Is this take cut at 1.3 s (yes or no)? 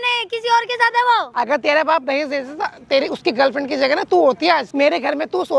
yes